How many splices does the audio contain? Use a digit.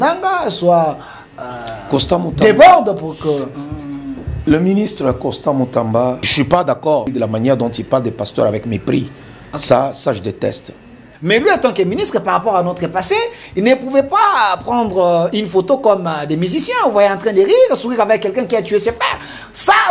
3